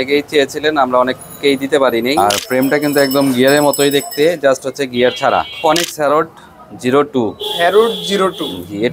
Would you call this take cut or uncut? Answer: cut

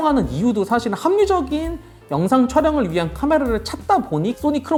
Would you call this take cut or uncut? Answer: uncut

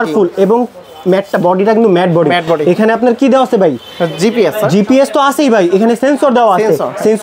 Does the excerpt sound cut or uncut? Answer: uncut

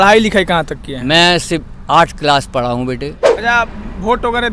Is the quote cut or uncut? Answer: cut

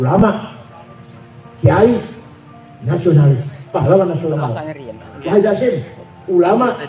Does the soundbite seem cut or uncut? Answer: uncut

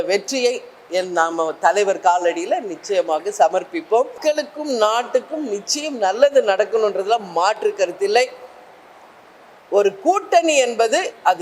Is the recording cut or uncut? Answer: cut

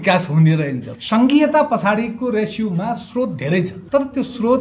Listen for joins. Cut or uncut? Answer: cut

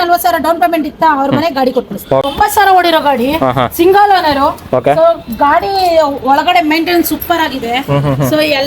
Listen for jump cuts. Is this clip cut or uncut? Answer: cut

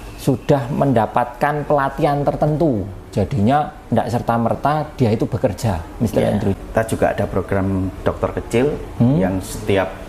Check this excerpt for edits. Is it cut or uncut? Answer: cut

